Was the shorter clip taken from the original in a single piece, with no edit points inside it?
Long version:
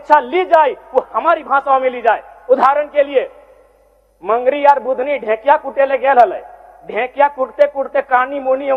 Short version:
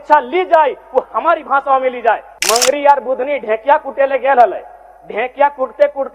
no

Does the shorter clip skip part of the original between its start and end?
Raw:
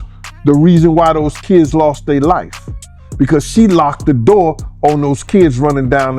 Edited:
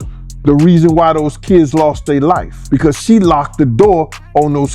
yes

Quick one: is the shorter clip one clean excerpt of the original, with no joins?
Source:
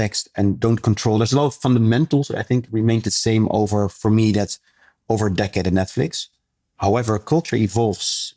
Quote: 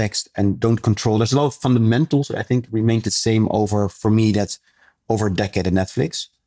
yes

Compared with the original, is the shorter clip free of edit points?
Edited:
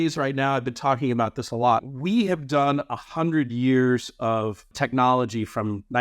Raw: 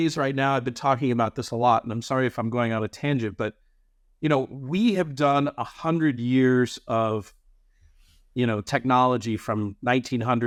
no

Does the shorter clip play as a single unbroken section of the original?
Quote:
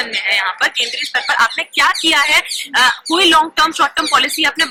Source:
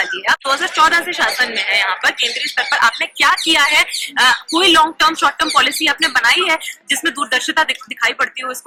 yes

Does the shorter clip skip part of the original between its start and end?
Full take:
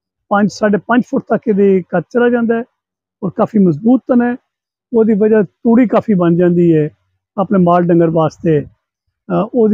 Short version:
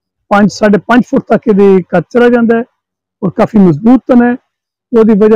no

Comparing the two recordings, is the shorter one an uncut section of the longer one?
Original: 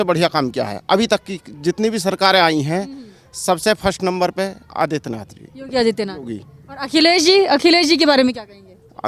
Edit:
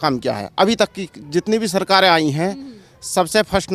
yes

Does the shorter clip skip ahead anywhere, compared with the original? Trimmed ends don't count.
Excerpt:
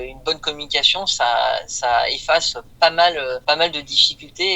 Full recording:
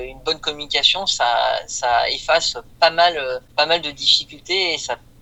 yes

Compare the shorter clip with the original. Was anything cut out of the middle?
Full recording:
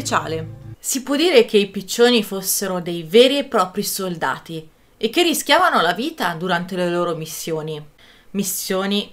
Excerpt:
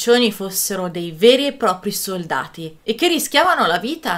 yes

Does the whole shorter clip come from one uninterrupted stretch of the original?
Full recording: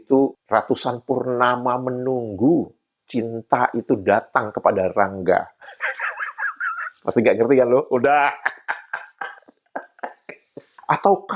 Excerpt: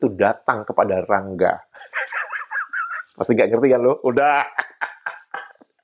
yes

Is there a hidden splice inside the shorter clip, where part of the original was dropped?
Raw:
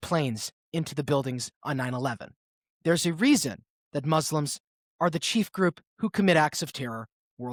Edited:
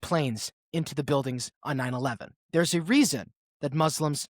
yes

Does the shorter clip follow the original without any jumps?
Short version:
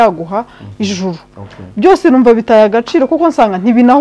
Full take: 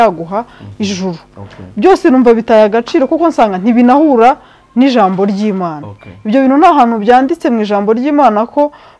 yes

